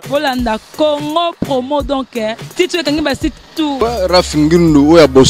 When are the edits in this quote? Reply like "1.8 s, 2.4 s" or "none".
3.8 s